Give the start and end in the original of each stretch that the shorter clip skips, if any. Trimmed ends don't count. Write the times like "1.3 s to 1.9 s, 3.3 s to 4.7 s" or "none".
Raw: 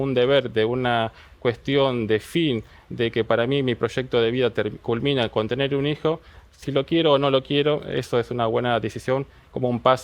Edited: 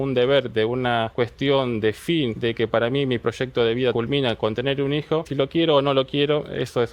1.1 s to 1.4 s, 2.6 s to 2.9 s, 4.5 s to 4.9 s, 6.2 s to 6.6 s